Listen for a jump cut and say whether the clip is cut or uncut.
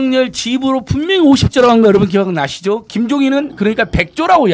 uncut